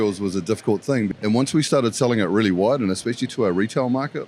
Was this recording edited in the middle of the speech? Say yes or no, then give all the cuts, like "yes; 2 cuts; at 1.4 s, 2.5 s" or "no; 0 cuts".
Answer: yes; 1 cut; at 1.1 s